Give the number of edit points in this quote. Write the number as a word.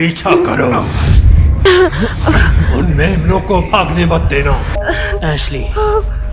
two